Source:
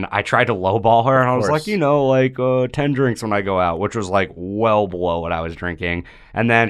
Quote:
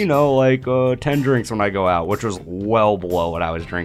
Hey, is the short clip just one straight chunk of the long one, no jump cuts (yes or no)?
no